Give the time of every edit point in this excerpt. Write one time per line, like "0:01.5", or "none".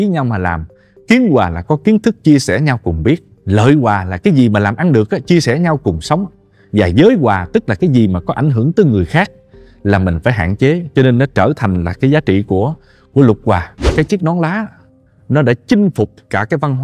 0:13.8